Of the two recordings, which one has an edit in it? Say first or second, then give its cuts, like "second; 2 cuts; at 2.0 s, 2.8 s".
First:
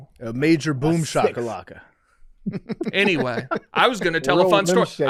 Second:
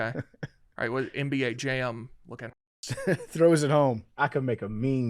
second; 1 cut; at 4.1 s